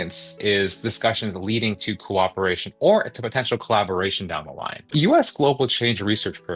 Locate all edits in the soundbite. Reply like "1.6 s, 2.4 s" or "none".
4.9 s